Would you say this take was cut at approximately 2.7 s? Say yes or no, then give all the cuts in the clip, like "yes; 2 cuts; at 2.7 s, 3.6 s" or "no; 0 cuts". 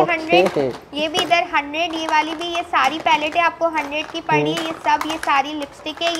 no; 0 cuts